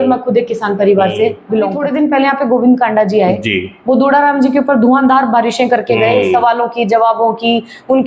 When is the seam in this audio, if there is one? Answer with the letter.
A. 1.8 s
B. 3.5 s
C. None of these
A